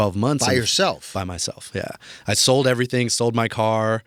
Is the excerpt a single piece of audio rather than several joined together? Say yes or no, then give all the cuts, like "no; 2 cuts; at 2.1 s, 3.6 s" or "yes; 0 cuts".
yes; 0 cuts